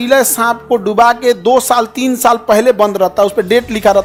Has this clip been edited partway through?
no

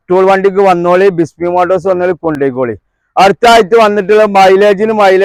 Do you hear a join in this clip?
no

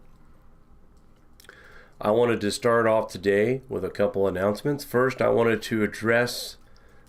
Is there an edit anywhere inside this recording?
no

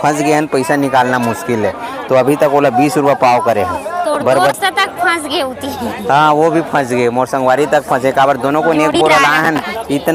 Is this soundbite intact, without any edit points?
yes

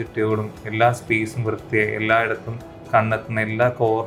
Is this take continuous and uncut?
yes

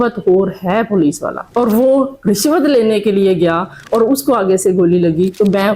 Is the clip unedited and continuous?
yes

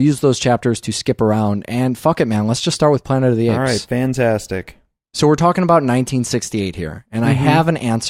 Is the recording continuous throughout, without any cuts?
no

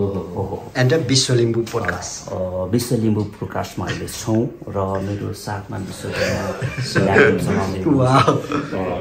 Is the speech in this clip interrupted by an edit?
no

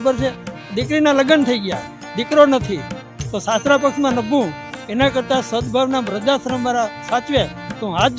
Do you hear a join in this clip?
no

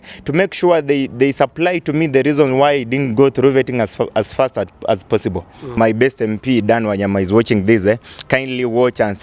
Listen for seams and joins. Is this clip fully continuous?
no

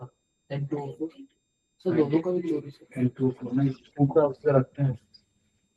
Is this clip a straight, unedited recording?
no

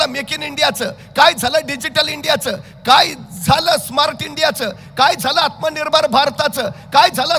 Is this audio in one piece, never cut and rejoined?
yes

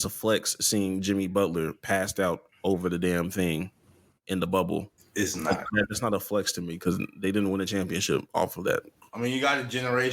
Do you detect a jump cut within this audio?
yes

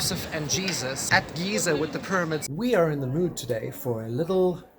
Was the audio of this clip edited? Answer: yes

